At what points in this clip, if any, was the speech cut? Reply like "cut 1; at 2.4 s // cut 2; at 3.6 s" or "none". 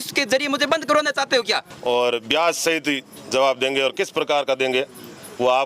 cut 1; at 1.7 s